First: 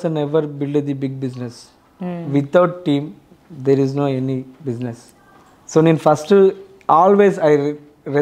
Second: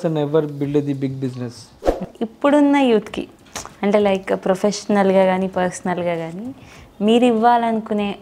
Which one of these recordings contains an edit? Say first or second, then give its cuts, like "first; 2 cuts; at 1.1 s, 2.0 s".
second; 1 cut; at 2.0 s